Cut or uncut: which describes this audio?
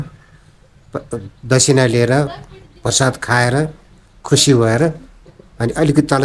uncut